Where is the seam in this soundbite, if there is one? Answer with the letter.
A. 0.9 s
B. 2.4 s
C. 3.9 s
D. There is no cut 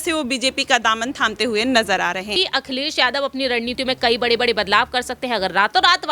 B